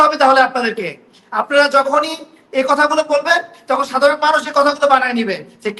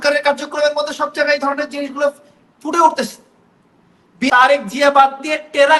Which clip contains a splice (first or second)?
second